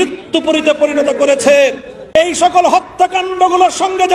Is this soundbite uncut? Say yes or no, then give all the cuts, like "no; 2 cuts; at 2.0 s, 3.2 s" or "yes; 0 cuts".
no; 1 cut; at 2.2 s